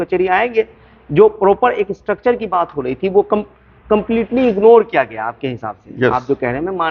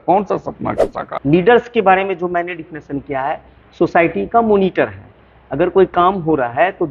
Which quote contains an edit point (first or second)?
second